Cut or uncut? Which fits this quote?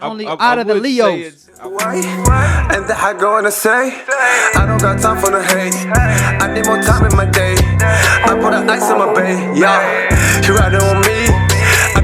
cut